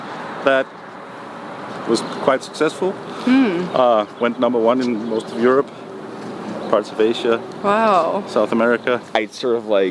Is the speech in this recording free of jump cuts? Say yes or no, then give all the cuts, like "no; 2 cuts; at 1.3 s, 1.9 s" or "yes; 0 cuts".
no; 1 cut; at 9.0 s